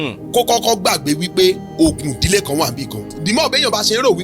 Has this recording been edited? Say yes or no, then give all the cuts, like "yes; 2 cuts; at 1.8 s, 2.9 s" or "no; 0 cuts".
yes; 1 cut; at 3.2 s